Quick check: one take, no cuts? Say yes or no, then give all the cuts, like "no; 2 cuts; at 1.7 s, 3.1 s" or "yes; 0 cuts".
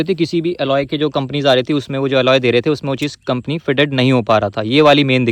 yes; 0 cuts